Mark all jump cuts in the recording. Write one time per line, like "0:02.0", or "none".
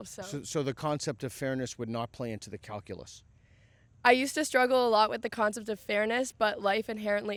none

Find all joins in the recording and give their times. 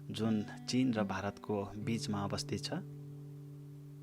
0:02.8

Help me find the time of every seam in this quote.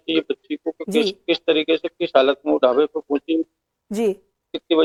none

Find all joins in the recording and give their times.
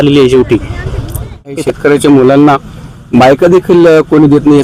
0:01.7

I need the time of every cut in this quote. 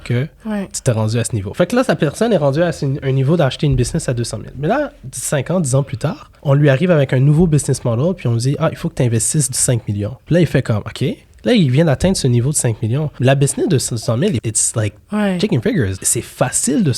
0:10.2
0:13.1
0:14.4
0:16.0

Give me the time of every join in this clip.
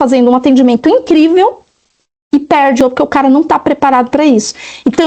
0:02.8

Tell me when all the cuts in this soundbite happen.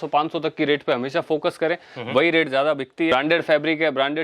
0:03.1

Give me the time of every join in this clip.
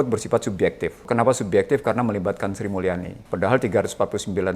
0:01.0
0:03.1

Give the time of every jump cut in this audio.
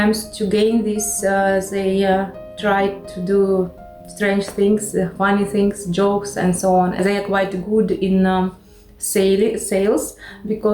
0:07.0

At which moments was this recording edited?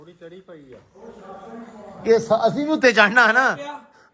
none

